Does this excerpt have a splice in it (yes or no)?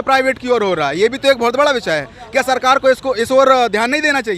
no